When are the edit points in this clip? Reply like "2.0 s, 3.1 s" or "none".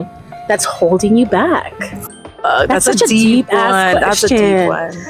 none